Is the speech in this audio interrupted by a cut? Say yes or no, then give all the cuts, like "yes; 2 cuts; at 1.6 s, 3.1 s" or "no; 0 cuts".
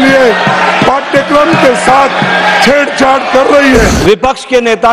yes; 1 cut; at 3.9 s